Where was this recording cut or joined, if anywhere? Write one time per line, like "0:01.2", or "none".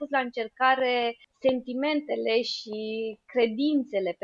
0:01.2